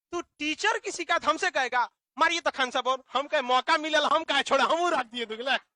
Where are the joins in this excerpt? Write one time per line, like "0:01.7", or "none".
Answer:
none